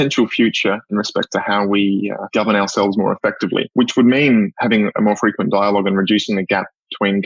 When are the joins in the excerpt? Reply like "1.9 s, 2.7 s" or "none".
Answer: 0.9 s, 2.2 s, 3.7 s